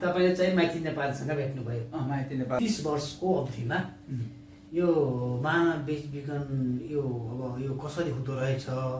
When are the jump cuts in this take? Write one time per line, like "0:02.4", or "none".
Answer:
0:02.6